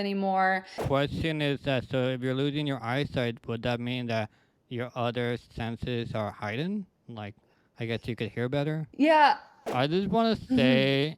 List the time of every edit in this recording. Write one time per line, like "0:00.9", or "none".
0:00.8
0:09.6